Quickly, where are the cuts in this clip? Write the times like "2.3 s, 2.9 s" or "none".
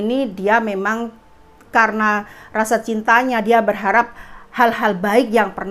none